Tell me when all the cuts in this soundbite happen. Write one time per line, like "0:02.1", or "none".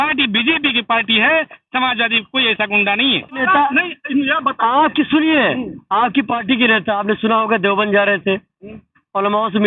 0:03.4